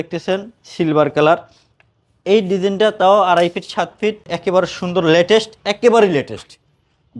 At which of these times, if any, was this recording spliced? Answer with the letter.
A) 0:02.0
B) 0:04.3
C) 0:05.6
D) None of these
B